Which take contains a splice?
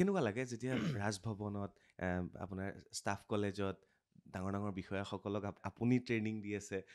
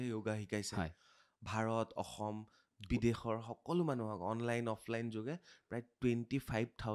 first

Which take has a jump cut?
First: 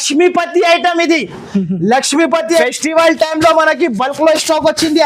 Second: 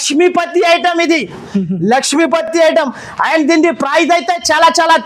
first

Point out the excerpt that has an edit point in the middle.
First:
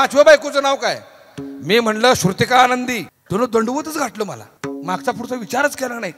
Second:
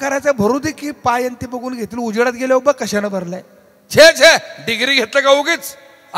first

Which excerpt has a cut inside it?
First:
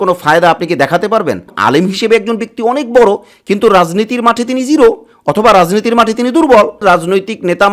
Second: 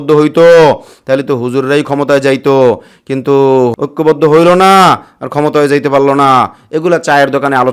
first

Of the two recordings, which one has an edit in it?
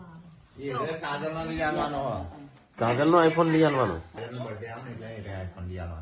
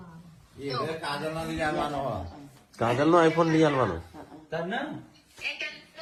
first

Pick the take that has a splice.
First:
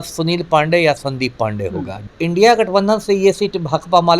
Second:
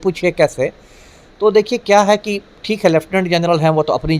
first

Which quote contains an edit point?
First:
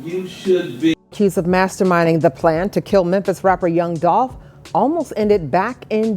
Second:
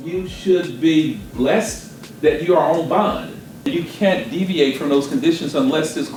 first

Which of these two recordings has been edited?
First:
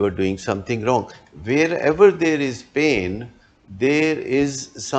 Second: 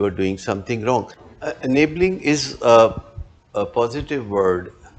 second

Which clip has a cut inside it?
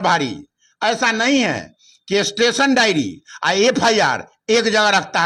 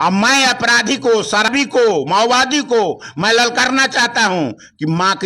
second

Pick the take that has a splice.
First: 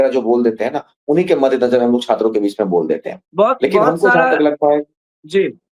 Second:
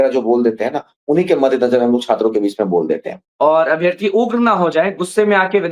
second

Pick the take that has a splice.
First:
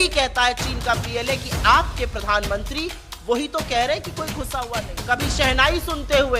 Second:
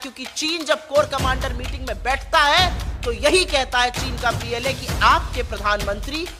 first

